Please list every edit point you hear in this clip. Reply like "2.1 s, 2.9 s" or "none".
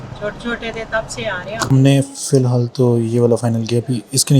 1.7 s